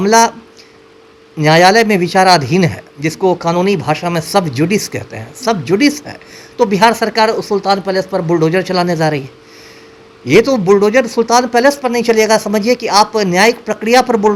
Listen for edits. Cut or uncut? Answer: uncut